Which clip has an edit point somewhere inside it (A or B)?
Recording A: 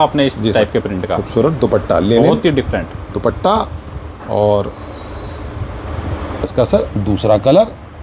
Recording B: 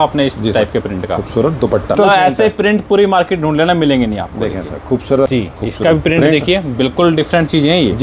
B